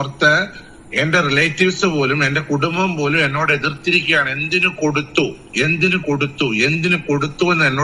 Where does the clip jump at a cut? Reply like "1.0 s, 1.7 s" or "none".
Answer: none